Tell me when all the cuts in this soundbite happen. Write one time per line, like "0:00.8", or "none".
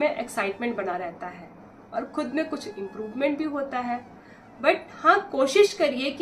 none